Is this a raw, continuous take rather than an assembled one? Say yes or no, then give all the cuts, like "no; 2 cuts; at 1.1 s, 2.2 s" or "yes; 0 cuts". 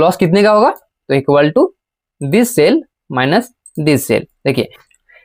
yes; 0 cuts